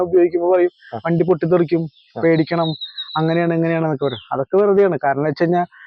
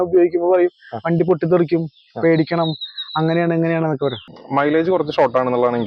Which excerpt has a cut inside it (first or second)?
second